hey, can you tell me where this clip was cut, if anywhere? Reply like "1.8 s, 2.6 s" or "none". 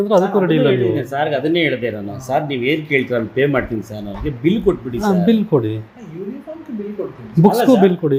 none